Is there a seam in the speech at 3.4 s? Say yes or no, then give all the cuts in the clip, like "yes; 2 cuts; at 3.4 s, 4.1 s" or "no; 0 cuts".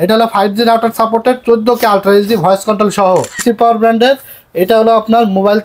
yes; 1 cut; at 3.4 s